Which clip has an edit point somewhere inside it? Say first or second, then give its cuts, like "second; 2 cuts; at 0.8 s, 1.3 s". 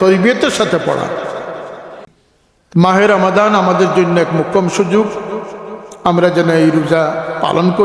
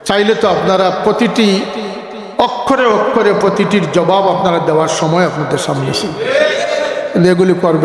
first; 1 cut; at 2.0 s